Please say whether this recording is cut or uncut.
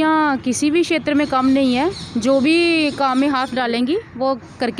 uncut